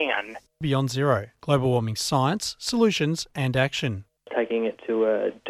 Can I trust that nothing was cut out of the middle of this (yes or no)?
yes